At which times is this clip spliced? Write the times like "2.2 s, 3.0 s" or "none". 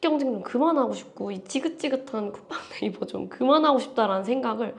none